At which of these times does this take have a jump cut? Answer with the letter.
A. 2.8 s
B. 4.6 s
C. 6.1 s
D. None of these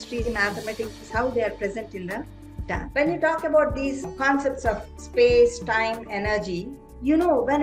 A